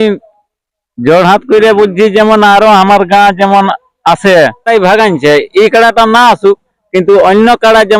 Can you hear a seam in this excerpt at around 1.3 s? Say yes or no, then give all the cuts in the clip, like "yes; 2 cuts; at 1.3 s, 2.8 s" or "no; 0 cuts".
no; 1 cut; at 4.7 s